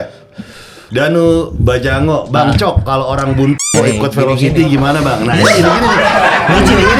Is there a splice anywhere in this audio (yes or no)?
no